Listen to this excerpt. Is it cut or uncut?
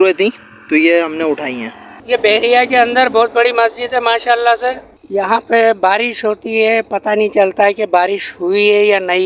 cut